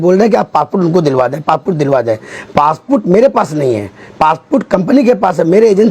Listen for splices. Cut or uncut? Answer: cut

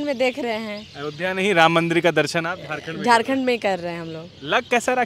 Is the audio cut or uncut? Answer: uncut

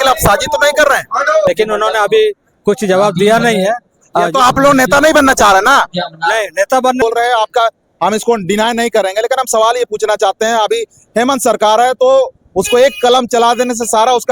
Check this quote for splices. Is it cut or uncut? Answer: cut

